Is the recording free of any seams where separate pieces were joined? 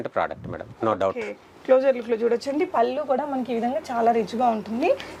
yes; 0 cuts

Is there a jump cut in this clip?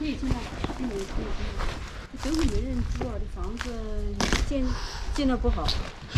no; 0 cuts

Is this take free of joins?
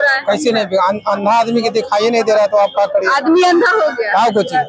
yes; 0 cuts

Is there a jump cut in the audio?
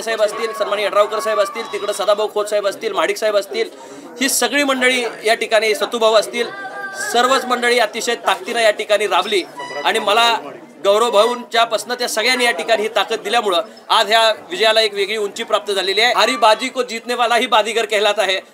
yes; 1 cut; at 16.1 s

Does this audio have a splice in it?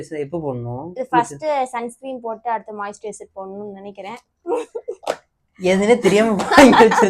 no; 0 cuts

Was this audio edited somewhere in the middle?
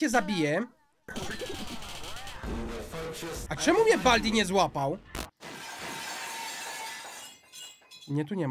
yes; 2 cuts; at 3.4 s, 5.1 s

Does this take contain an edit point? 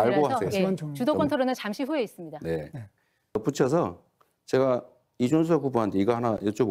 yes; 1 cut; at 3.4 s

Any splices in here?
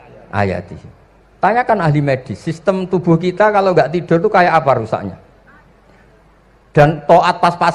no; 0 cuts

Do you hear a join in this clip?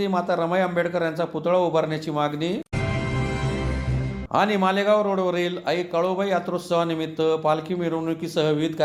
no; 0 cuts

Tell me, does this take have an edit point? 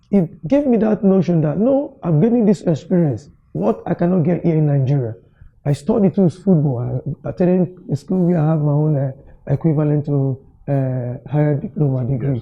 no; 0 cuts

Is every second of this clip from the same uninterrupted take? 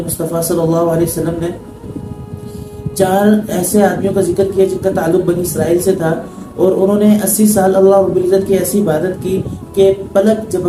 yes; 0 cuts

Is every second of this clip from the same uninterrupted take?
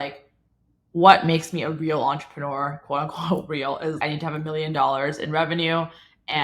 no; 1 cut; at 4.0 s

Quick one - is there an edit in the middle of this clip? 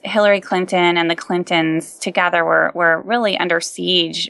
no; 0 cuts

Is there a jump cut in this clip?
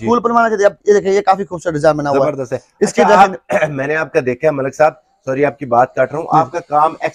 no; 0 cuts

